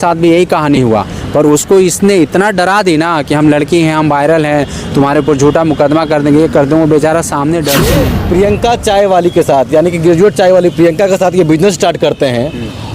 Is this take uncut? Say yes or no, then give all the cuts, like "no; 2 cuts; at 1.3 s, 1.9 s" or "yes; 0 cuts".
no; 1 cut; at 8.1 s